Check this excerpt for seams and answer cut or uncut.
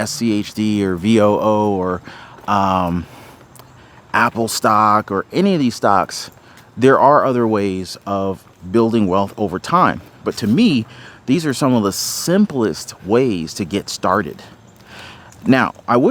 uncut